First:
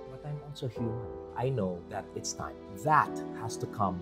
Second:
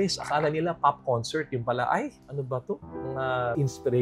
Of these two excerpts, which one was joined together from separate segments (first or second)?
first